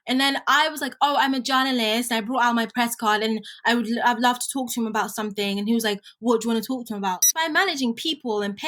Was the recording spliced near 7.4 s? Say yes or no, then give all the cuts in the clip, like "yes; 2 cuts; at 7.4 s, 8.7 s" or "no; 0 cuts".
yes; 1 cut; at 7.4 s